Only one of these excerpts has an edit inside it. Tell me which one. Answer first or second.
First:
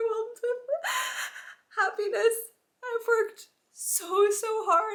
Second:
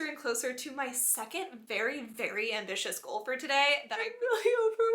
second